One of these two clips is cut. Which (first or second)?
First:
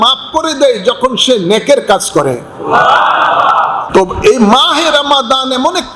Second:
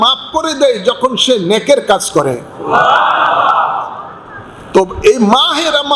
first